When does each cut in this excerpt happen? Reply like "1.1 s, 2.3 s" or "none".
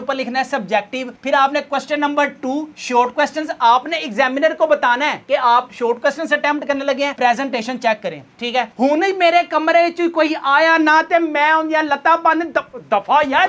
8.7 s

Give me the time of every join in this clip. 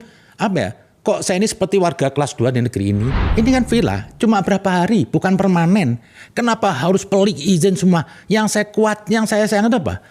3.2 s

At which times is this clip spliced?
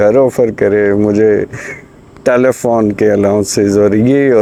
none

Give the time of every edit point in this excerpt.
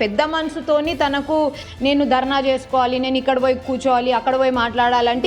1.6 s

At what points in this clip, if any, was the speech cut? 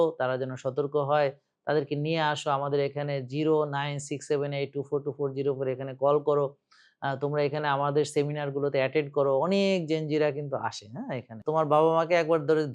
11.4 s

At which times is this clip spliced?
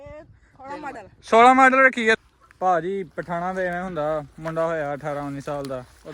2.2 s

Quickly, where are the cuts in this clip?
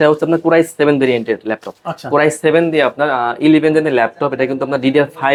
none

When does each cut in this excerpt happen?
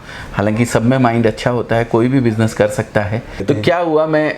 3.4 s

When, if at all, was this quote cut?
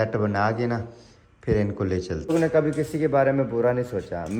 2.3 s

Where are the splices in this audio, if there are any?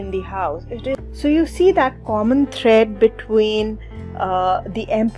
1.0 s

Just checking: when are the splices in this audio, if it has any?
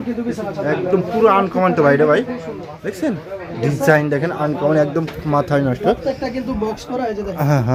none

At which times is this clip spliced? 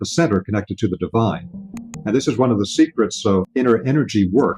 1.6 s, 3.5 s

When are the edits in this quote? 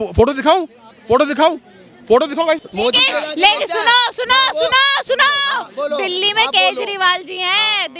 2.7 s

